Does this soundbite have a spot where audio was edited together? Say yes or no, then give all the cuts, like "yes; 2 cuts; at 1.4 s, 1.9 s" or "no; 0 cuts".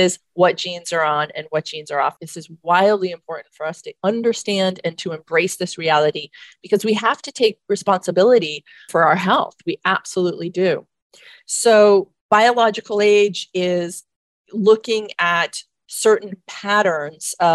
no; 0 cuts